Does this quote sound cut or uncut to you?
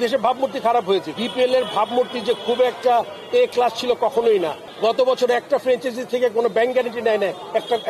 cut